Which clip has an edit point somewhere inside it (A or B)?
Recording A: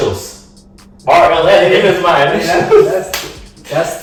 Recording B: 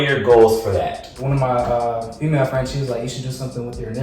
B